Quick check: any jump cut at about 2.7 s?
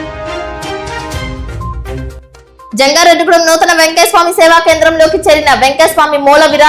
yes; 1 cut; at 2.7 s

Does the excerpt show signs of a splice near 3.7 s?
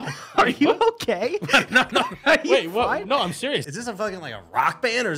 yes; 1 cut; at 3.7 s

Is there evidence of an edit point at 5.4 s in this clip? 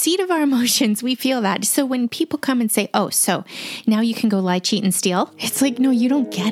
yes; 1 cut; at 5.4 s

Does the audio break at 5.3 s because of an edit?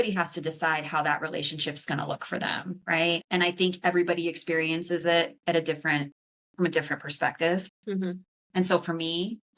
no; 1 cut; at 3.2 s

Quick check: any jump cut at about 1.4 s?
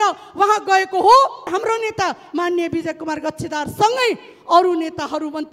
yes; 1 cut; at 1.4 s

